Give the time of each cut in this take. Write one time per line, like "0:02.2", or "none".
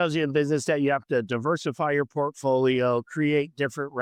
none